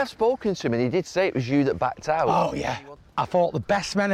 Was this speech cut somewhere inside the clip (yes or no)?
yes